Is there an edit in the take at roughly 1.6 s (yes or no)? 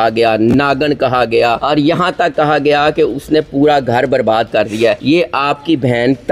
yes